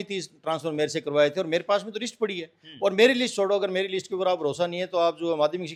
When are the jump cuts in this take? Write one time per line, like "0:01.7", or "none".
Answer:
none